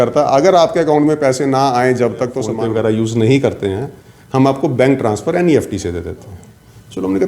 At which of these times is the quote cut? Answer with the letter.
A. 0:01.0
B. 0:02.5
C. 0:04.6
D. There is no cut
B